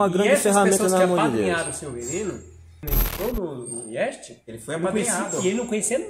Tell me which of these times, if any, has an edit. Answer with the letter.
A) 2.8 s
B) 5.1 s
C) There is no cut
A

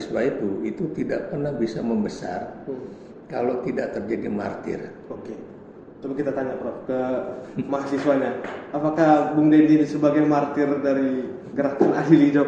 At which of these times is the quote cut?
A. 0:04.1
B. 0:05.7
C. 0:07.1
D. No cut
D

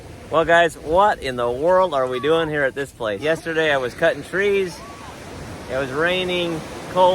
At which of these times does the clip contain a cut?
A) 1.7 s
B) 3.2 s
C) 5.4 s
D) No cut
B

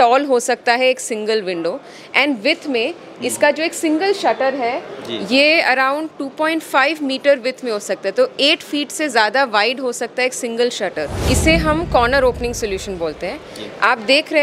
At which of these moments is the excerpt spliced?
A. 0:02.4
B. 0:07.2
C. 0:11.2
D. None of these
C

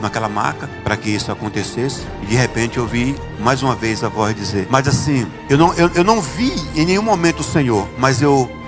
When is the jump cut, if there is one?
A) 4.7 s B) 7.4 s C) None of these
A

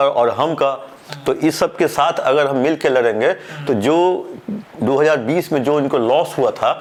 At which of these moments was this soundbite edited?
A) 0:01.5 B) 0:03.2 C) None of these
C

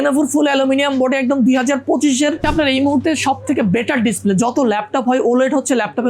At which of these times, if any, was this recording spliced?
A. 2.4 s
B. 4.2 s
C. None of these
A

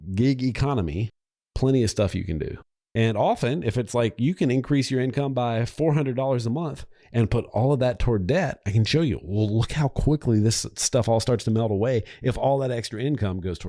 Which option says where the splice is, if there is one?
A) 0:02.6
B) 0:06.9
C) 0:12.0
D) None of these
A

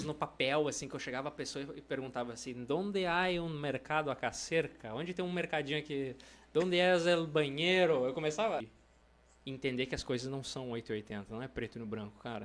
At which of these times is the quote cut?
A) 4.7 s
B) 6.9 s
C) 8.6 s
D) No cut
C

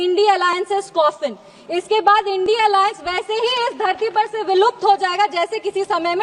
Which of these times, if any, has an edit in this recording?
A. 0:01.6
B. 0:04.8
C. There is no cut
C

